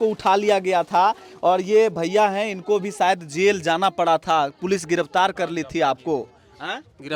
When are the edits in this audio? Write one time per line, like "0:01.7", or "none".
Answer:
none

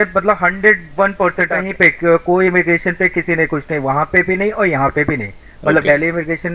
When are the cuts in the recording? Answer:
0:01.6

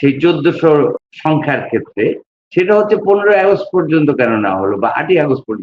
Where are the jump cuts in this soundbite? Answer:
0:01.0

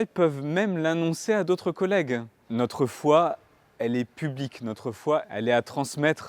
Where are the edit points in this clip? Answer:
0:02.4
0:05.3

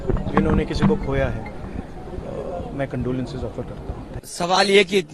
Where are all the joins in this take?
none

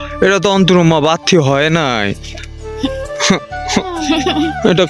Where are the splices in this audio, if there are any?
none

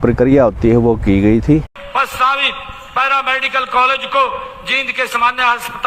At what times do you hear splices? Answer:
0:01.7

